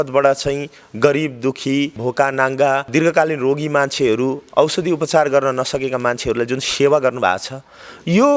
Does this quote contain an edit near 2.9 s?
yes; 2 cuts; at 2.0 s, 2.9 s

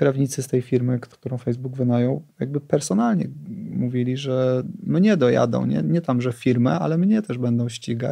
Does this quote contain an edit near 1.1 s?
yes; 1 cut; at 1.1 s

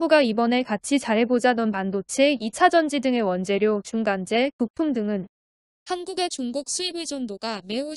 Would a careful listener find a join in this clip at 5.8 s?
no; 0 cuts

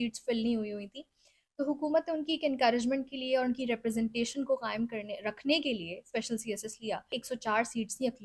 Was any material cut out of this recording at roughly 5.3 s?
no; 1 cut; at 7.1 s

